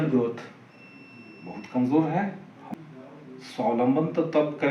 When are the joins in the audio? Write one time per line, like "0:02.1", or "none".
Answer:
0:02.5